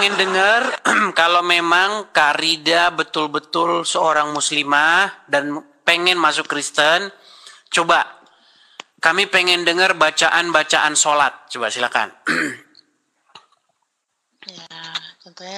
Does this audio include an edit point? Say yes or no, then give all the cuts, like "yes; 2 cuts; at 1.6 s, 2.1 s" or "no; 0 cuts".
no; 0 cuts